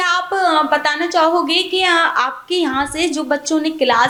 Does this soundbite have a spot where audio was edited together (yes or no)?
no